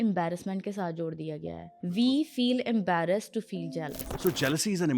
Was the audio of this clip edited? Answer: yes; 2 cuts; at 1.7 s, 4.0 s

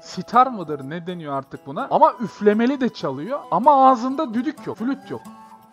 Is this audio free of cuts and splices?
no; 3 cuts; at 1.9 s, 3.4 s, 4.8 s

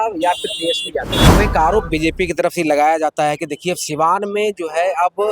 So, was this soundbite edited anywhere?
yes; 1 cut; at 1.1 s

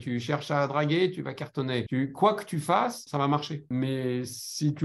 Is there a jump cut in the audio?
yes; 2 cuts; at 1.9 s, 3.5 s

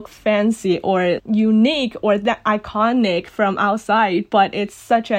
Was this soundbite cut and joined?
yes; 1 cut; at 1.2 s

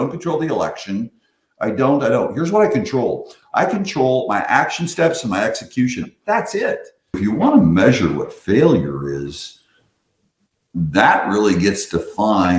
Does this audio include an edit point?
yes; 1 cut; at 7.2 s

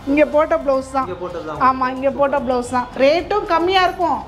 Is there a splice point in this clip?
yes; 1 cut; at 2.9 s

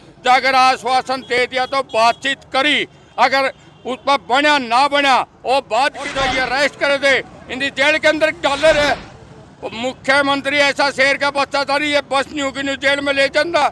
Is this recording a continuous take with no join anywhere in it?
no; 1 cut; at 6.1 s

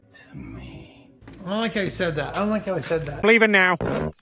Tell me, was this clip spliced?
yes; 1 cut; at 3.1 s

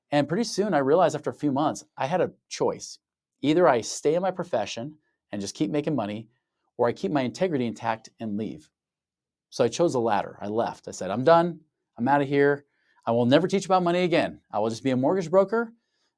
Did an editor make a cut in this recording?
no; 0 cuts

